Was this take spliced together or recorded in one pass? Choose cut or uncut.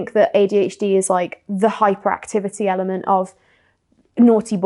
uncut